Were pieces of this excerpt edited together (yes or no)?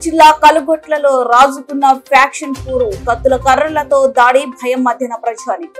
no